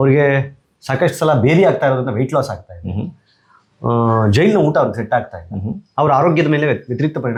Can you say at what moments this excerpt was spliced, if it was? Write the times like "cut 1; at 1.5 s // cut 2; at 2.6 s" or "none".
none